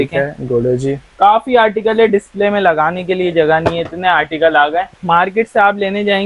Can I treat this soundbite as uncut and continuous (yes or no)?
no